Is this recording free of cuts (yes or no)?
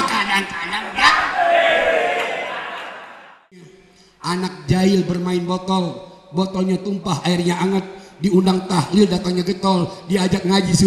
no